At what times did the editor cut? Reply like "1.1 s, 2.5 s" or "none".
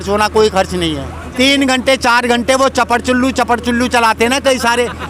1.2 s

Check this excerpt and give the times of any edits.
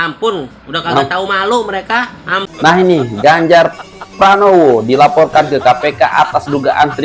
2.4 s

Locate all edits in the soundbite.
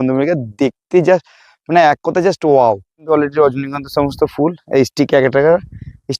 3.1 s

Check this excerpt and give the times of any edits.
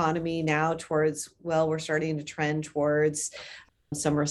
none

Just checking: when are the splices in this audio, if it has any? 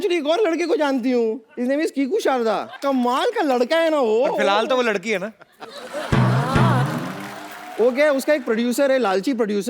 1.5 s, 2.8 s

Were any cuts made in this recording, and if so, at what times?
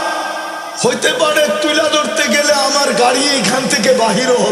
none

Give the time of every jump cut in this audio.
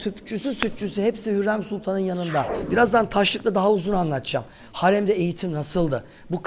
2.6 s

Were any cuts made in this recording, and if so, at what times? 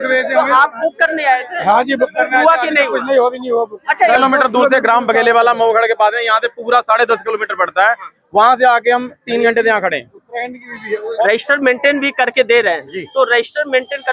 4.1 s, 11.2 s

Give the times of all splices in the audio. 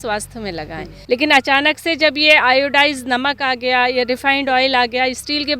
0.9 s

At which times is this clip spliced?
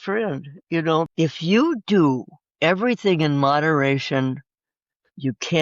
1.1 s

